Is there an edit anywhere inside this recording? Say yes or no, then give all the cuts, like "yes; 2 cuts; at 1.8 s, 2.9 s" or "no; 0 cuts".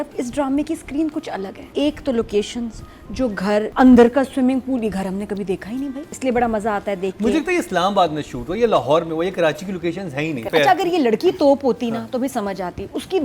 yes; 4 cuts; at 1.6 s, 3.7 s, 6.1 s, 10.5 s